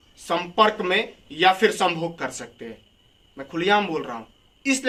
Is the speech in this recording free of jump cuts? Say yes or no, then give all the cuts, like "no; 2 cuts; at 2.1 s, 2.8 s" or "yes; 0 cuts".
yes; 0 cuts